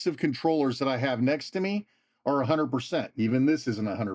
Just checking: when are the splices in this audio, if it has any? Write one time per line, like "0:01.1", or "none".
0:03.1